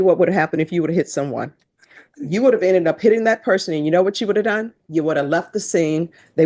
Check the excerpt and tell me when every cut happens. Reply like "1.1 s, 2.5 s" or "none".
none